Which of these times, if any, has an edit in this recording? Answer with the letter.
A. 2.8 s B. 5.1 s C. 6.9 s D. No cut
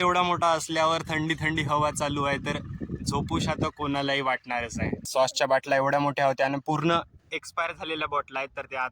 B